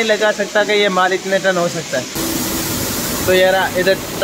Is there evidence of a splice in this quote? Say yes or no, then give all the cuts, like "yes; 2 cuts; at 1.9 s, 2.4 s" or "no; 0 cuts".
yes; 1 cut; at 2.1 s